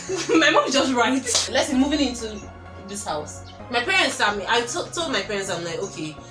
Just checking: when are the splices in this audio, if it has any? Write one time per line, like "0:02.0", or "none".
none